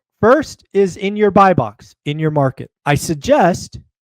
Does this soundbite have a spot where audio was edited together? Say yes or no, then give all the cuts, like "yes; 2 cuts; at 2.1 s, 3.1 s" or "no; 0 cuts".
yes; 1 cut; at 2.7 s